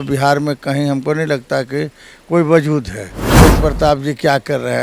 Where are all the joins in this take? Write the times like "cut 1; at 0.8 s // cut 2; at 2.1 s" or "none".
cut 1; at 3.3 s